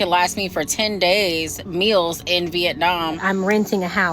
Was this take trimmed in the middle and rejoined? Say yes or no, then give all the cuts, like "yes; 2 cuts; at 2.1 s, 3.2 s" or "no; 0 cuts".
yes; 1 cut; at 3.2 s